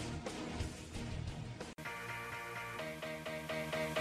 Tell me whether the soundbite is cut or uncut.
cut